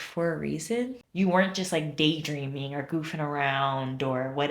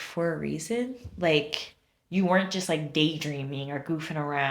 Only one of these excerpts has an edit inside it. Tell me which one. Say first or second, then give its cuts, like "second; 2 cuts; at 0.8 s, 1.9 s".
first; 1 cut; at 1.0 s